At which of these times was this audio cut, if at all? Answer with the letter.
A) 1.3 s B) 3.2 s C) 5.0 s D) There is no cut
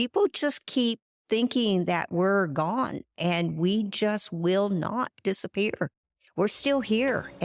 D